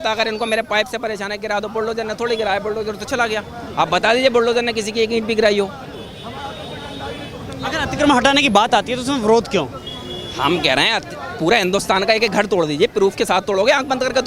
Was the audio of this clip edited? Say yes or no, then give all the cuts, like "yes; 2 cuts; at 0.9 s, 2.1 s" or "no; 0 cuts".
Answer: no; 0 cuts